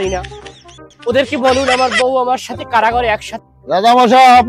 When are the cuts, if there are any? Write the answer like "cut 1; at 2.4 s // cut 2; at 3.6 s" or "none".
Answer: cut 1; at 3.4 s